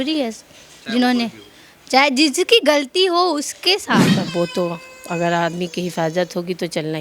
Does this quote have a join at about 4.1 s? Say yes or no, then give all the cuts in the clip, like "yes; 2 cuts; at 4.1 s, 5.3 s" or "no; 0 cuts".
yes; 1 cut; at 4.1 s